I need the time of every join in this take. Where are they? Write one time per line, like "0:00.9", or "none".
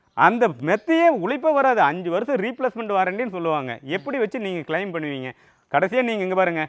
none